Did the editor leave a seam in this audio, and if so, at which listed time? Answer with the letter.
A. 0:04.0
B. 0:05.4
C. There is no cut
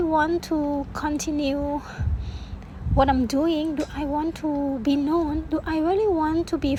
C